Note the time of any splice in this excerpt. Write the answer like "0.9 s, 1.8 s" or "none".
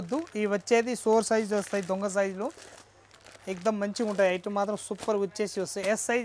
none